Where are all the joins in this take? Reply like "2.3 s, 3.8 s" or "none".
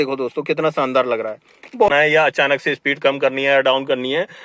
1.9 s